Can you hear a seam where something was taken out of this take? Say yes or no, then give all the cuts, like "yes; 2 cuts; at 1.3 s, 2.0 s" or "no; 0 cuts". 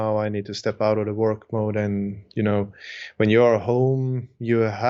no; 0 cuts